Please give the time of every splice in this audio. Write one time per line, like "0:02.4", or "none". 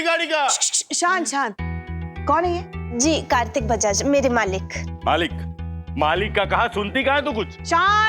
none

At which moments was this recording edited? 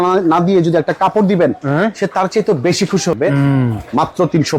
0:03.2

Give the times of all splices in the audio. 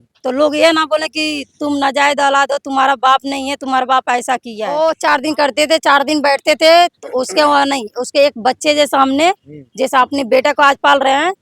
0:04.7

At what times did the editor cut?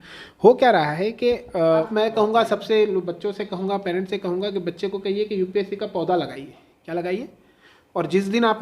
0:01.9

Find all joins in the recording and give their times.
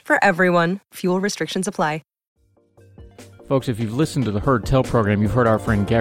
0:02.4

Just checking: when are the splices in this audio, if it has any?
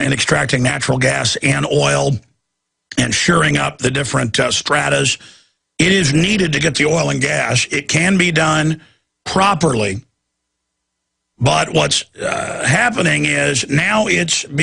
0:12.9

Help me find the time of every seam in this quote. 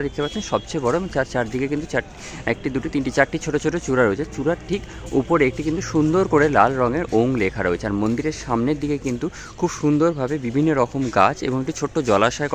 none

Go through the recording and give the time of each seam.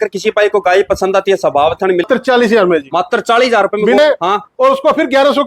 0:02.1
0:04.0

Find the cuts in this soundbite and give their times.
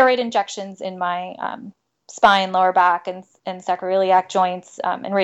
none

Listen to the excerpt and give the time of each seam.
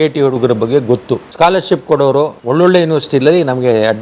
0:01.3
0:02.4

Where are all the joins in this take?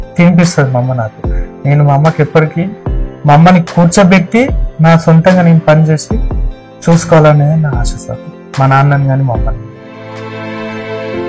0:09.9

